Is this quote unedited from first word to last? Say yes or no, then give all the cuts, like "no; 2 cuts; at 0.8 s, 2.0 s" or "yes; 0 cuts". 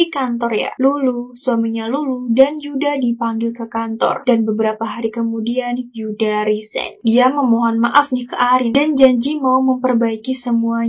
yes; 0 cuts